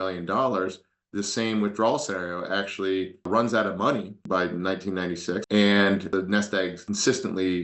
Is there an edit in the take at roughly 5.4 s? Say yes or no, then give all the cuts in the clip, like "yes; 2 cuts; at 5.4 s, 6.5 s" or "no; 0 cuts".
yes; 1 cut; at 5.4 s